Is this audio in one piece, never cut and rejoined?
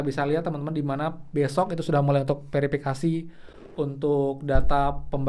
yes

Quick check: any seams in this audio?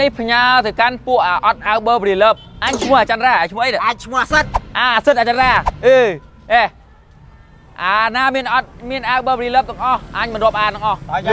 no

